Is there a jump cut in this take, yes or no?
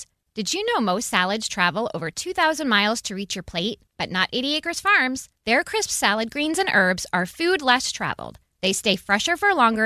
no